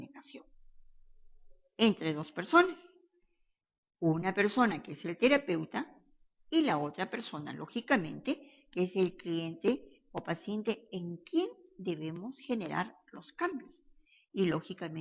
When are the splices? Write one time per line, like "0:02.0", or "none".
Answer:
0:04.5